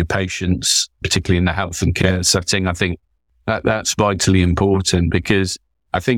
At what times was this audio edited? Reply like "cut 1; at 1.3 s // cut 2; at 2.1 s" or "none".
none